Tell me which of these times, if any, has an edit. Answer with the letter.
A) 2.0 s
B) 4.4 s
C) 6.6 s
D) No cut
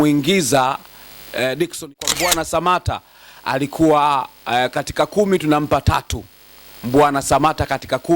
A